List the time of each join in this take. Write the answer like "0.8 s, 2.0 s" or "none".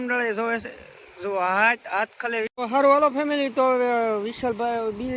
2.5 s